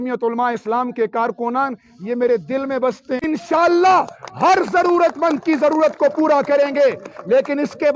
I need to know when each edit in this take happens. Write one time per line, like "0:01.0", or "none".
0:03.2